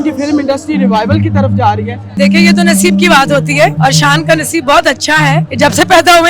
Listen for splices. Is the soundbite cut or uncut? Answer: cut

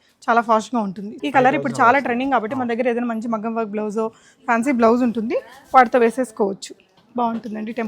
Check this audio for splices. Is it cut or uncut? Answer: cut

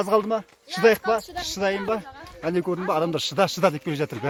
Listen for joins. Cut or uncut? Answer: uncut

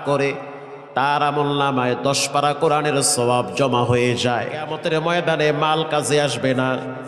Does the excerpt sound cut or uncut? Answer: cut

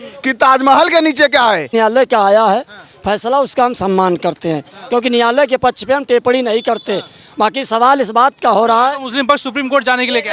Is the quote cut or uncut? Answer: cut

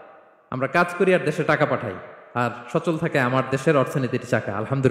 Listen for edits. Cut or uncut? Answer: uncut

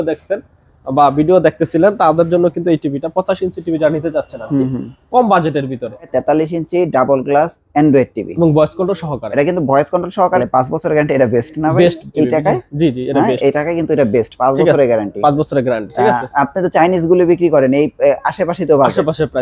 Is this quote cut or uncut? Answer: cut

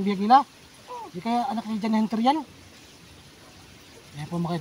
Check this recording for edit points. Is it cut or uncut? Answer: uncut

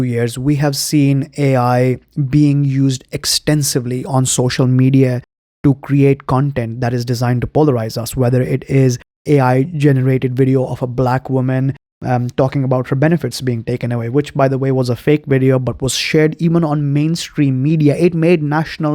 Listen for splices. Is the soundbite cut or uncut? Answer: uncut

